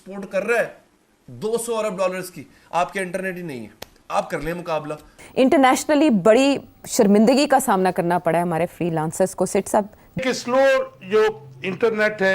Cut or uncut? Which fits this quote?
cut